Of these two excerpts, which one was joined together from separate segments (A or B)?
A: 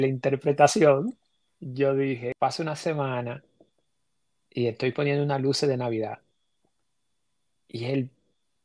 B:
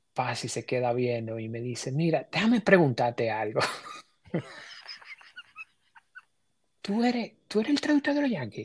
A